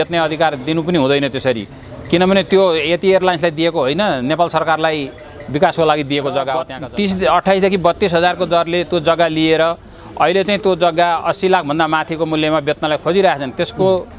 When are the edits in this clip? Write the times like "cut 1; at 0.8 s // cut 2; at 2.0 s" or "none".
cut 1; at 6.8 s